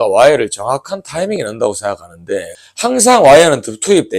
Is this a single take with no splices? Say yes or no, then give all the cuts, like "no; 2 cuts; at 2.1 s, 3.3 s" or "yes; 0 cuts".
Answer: no; 1 cut; at 2.7 s